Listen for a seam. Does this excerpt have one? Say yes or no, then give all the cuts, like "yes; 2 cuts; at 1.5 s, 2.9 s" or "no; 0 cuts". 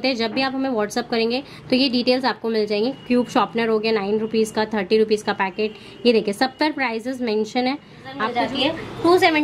yes; 1 cut; at 8.3 s